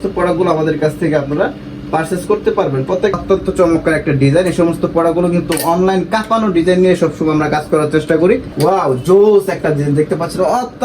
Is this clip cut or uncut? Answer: cut